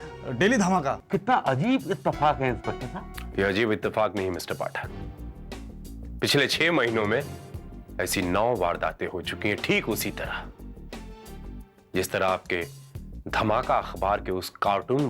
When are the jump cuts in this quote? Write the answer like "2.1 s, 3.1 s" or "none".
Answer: 1.0 s

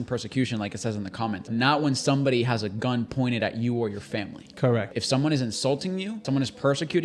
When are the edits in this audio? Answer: 1.4 s, 4.9 s, 6.2 s

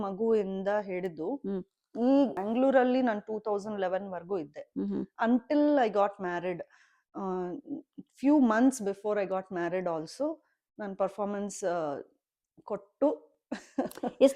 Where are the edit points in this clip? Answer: 2.4 s

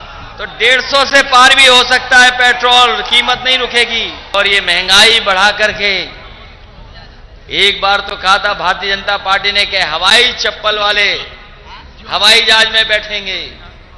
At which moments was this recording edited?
4.3 s

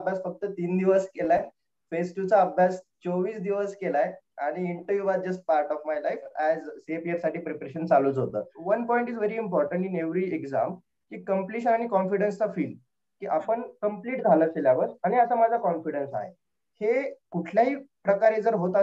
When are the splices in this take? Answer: 8.5 s

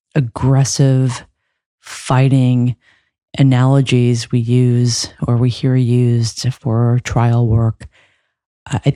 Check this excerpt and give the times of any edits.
none

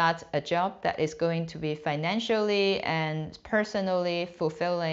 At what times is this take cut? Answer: none

